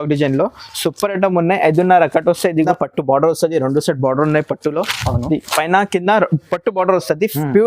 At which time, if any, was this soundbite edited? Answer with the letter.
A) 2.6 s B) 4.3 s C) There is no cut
A